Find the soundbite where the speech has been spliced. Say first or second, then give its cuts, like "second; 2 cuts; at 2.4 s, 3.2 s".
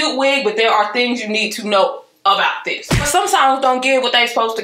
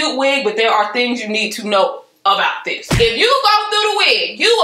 first; 1 cut; at 3.0 s